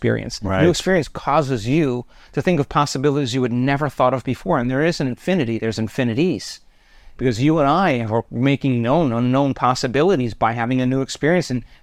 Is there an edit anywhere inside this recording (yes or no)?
no